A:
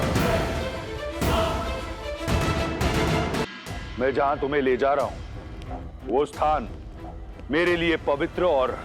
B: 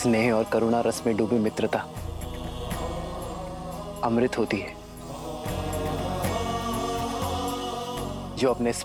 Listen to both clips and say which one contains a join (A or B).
A